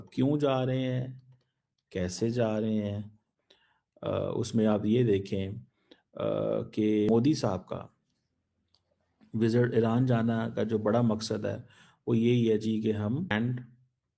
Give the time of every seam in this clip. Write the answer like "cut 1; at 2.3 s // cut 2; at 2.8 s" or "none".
cut 1; at 3.1 s // cut 2; at 7.1 s // cut 3; at 13.3 s